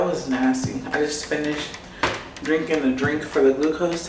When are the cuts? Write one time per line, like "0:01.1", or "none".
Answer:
none